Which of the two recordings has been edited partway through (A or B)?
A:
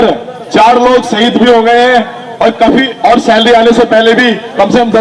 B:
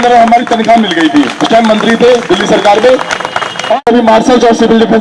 B